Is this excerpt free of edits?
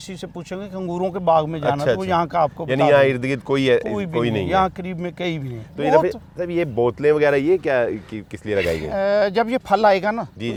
yes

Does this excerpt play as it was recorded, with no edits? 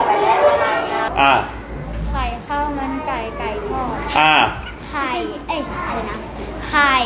no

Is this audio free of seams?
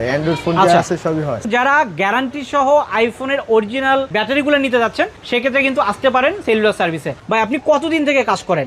no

